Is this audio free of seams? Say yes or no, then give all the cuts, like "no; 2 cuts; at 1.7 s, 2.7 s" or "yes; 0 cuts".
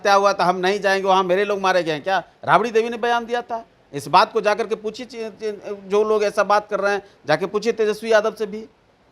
yes; 0 cuts